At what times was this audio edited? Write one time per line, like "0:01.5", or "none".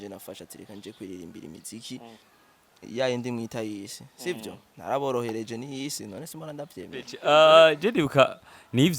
0:07.1